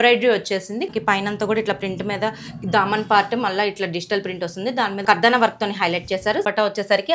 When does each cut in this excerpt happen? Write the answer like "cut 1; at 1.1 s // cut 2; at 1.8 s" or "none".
cut 1; at 0.9 s // cut 2; at 5.0 s // cut 3; at 6.4 s